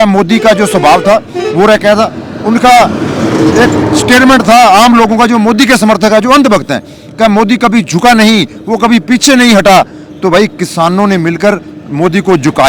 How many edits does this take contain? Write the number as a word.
zero